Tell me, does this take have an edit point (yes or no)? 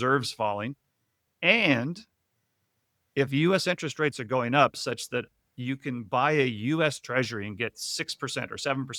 no